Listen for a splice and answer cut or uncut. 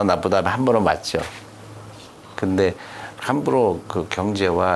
uncut